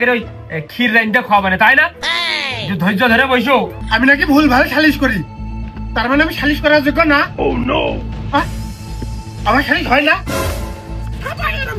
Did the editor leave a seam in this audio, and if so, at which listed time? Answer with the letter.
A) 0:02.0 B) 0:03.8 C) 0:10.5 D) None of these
B